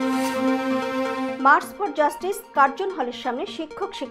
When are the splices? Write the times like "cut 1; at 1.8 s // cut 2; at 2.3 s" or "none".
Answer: cut 1; at 1.3 s